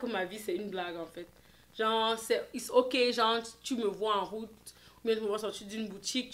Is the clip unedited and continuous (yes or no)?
yes